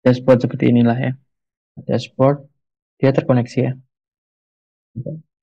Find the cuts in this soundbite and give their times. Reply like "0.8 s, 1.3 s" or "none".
1.8 s